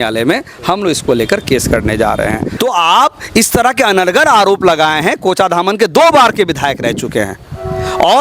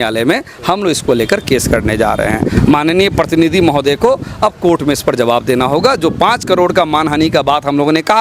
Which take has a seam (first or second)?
first